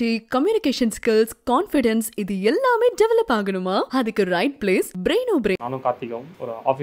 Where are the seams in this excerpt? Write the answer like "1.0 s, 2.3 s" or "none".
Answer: 5.8 s